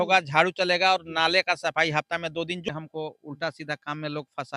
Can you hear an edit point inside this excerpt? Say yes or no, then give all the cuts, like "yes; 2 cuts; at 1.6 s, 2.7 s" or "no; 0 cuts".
yes; 1 cut; at 2.7 s